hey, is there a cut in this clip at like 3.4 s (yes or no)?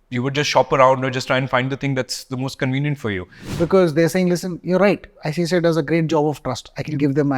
yes